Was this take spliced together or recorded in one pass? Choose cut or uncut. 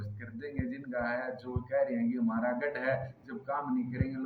uncut